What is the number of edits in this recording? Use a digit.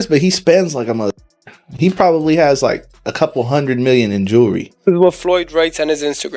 1